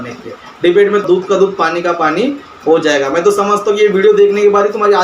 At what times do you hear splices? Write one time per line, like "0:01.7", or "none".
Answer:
0:01.0